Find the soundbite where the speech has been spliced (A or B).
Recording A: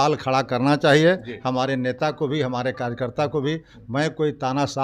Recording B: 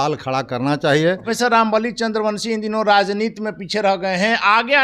B